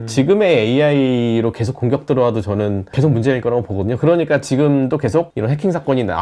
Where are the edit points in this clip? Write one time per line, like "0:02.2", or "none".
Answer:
0:02.9
0:05.3